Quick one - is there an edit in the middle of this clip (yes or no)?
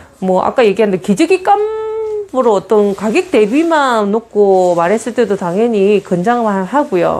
no